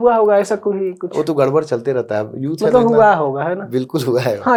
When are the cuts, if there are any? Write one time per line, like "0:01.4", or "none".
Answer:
none